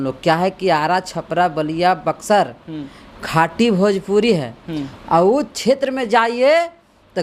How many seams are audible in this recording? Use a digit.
0